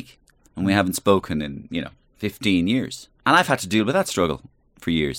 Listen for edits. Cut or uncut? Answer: cut